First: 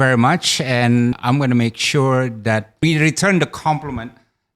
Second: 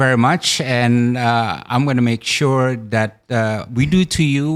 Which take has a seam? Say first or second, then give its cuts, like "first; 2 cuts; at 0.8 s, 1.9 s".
first; 2 cuts; at 1.2 s, 2.7 s